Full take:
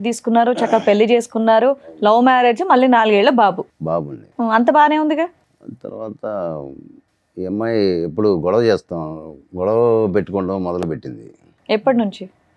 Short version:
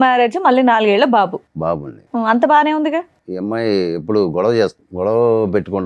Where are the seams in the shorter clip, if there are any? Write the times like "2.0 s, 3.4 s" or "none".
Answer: 3.2 s, 4.8 s